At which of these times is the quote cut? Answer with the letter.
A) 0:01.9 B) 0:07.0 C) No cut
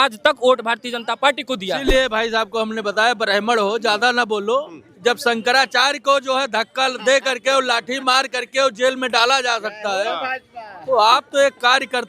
A